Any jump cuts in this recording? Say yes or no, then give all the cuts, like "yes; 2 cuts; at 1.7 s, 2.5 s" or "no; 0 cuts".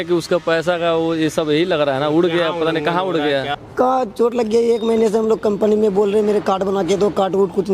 yes; 1 cut; at 3.6 s